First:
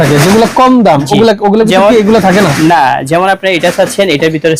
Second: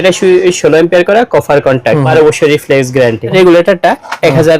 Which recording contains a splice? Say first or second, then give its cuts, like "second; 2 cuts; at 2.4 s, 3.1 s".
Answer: second; 2 cuts; at 2.1 s, 3.3 s